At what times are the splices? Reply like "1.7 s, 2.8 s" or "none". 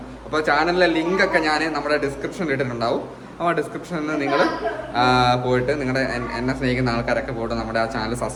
none